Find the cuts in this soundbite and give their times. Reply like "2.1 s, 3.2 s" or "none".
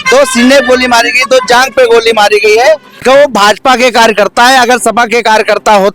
3.0 s